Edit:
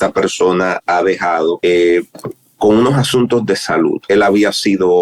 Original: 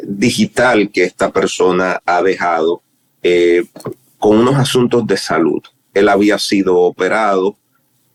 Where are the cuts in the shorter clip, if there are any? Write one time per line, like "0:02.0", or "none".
0:01.6
0:04.0